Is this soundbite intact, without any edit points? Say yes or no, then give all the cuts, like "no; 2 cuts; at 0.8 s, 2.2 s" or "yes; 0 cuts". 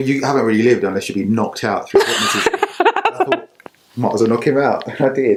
yes; 0 cuts